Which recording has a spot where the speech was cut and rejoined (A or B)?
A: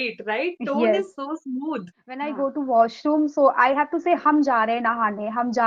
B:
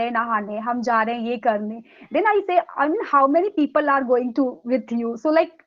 A